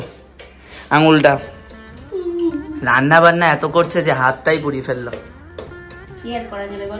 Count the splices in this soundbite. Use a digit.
0